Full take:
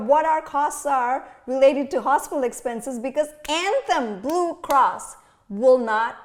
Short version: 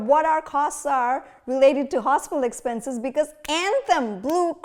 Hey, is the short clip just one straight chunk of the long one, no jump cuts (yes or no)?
yes